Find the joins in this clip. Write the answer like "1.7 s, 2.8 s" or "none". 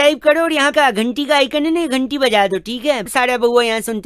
none